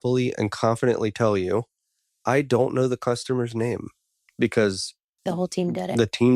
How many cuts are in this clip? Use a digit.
2